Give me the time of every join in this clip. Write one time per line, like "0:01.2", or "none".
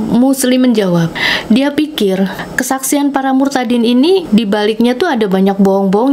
0:01.3
0:02.5
0:04.2